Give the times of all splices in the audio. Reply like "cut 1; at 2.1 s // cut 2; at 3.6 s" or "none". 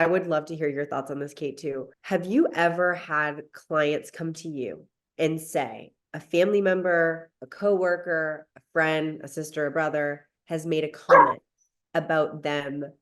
cut 1; at 1.9 s